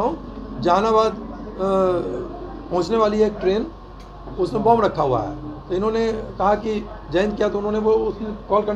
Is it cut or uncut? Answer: uncut